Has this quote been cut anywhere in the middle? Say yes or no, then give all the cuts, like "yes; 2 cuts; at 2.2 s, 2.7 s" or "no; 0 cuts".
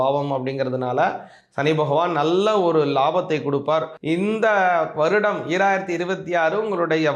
yes; 1 cut; at 3.9 s